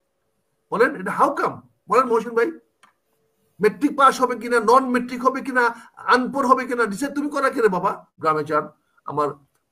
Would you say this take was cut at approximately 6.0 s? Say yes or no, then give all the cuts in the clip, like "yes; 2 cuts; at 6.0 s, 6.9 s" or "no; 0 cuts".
no; 1 cut; at 8.1 s